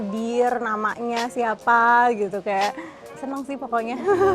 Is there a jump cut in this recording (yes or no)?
no